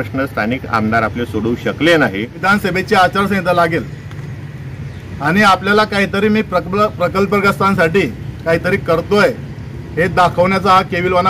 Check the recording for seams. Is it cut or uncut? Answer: cut